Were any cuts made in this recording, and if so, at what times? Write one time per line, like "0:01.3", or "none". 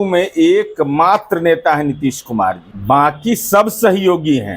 0:02.7